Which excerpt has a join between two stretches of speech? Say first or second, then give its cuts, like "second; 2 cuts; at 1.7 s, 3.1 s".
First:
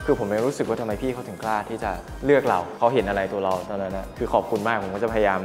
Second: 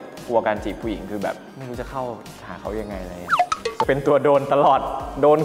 second; 1 cut; at 3.9 s